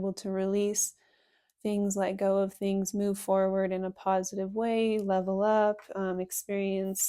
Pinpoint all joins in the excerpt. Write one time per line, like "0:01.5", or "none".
none